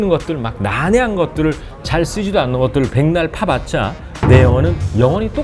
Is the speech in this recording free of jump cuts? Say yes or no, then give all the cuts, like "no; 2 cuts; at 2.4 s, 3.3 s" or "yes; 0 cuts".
yes; 0 cuts